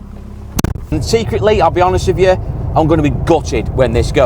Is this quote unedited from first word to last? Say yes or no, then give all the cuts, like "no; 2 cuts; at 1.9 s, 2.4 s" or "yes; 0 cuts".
no; 1 cut; at 0.9 s